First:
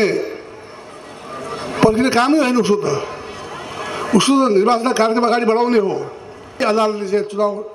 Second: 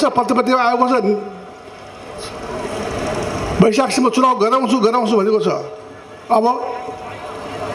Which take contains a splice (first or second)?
first